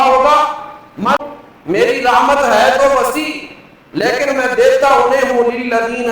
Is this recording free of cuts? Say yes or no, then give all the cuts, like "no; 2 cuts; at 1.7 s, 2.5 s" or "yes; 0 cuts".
no; 1 cut; at 1.2 s